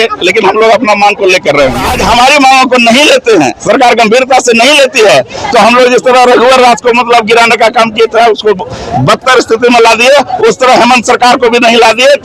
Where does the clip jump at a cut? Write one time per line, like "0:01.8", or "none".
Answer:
0:01.9